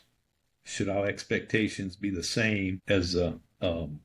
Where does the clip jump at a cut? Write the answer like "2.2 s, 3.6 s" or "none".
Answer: 2.8 s